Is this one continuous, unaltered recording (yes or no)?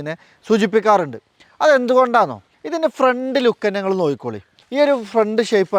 yes